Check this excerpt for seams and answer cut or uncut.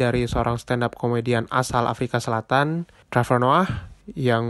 cut